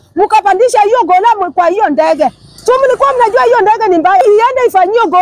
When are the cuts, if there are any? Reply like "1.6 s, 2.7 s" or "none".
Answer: 4.2 s